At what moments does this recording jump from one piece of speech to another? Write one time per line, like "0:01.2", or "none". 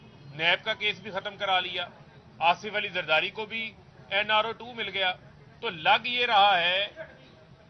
none

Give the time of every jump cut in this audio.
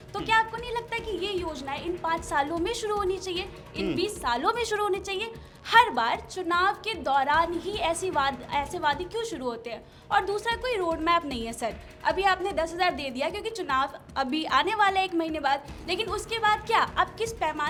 none

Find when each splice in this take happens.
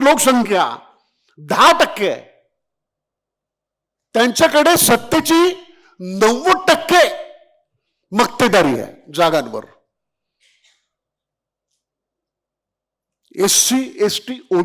none

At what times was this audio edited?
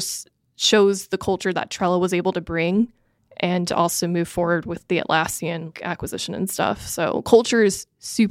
0:04.8
0:05.7

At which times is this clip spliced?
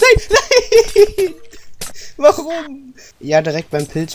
0:03.2

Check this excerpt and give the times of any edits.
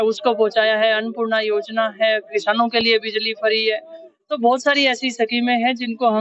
none

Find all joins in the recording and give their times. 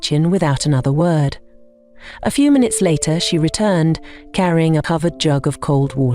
0:04.8

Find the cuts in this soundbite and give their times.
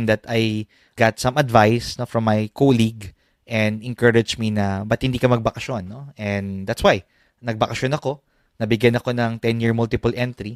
0:00.9

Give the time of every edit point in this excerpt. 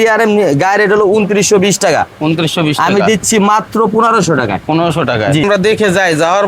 0:05.4

